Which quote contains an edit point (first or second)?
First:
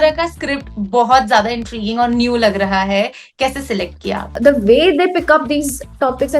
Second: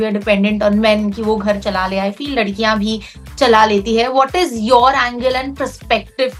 first